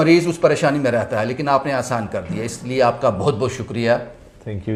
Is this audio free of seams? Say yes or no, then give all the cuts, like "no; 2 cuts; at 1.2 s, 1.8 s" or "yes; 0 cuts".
yes; 0 cuts